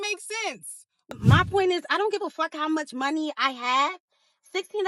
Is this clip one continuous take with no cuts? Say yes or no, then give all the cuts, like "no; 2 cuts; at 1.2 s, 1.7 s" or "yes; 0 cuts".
no; 1 cut; at 1.1 s